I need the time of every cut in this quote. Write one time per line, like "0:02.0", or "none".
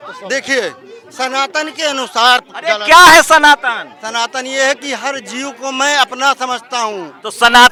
none